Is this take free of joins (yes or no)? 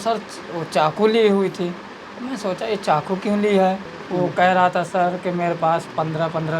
no